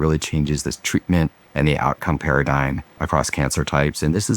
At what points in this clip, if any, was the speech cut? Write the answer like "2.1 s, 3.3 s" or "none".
1.4 s, 2.9 s